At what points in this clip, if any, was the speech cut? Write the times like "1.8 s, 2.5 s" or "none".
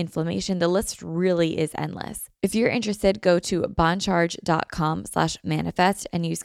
2.2 s